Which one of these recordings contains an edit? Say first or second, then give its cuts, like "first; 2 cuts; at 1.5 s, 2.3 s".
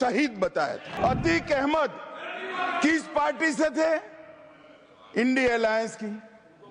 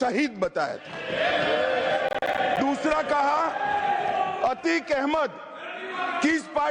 first; 1 cut; at 0.9 s